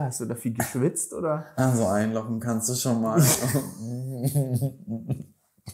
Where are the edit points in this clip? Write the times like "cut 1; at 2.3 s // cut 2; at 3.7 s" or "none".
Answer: none